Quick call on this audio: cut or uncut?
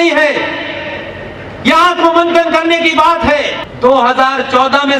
cut